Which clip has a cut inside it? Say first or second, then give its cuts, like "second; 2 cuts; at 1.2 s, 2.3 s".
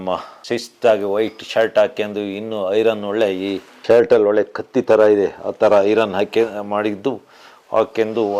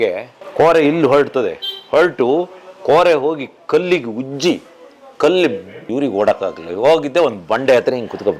second; 1 cut; at 5.9 s